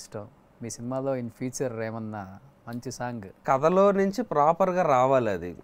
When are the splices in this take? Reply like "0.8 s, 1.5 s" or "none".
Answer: 3.4 s